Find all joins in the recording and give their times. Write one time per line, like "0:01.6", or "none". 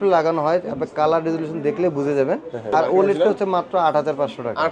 0:02.6